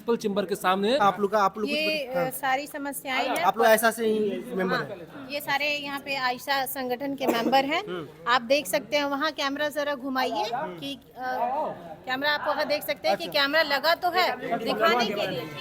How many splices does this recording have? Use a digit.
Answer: 1